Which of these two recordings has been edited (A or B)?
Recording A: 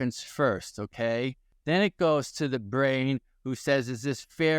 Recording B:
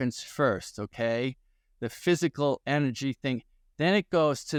A